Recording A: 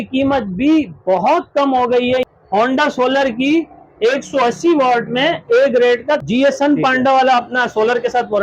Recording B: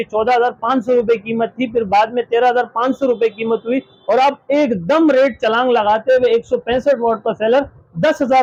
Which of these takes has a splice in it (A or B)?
A